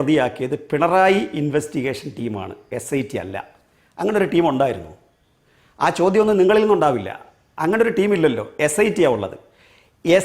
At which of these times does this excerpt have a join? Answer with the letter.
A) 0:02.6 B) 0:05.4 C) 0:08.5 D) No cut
D